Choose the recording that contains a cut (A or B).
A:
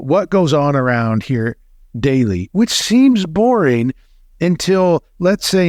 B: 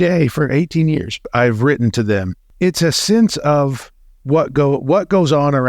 B